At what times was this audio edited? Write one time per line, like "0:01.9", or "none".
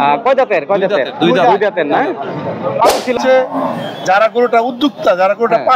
0:03.1

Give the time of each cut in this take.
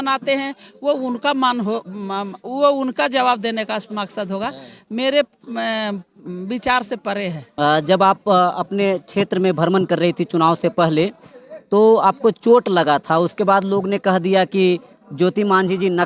0:07.5

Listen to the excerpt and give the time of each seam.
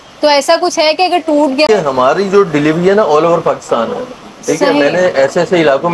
0:01.7

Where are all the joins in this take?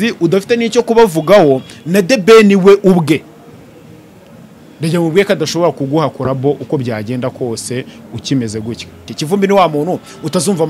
0:09.1

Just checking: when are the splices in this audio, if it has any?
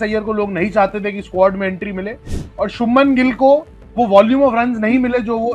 none

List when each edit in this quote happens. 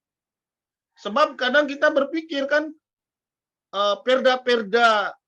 none

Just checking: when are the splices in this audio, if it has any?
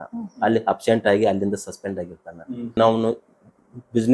0:02.8

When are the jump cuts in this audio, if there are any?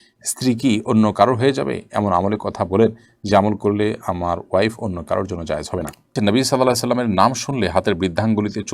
0:06.2

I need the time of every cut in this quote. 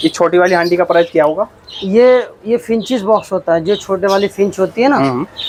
none

